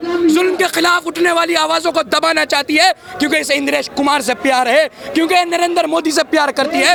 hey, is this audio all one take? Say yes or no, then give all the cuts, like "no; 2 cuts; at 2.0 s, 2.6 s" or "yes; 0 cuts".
yes; 0 cuts